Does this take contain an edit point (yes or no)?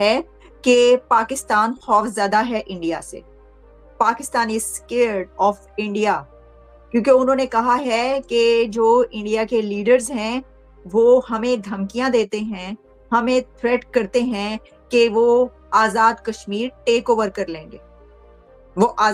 no